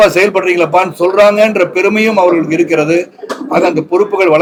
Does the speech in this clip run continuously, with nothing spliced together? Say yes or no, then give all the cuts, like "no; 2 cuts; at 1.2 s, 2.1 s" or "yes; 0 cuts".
yes; 0 cuts